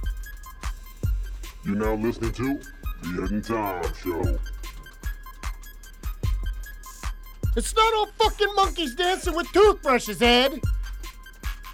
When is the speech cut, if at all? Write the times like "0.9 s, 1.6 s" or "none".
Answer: 1.0 s